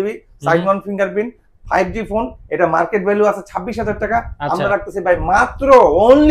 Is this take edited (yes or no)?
no